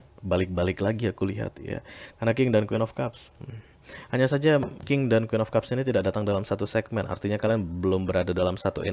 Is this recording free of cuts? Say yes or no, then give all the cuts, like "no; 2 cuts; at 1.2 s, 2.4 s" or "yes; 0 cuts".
yes; 0 cuts